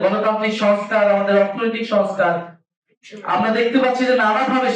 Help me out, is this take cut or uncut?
uncut